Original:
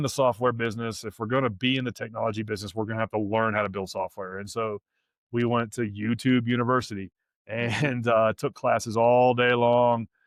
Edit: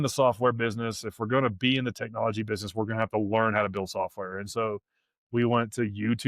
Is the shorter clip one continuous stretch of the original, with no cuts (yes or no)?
yes